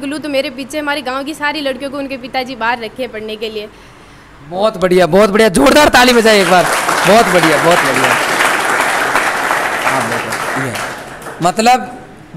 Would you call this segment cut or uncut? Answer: uncut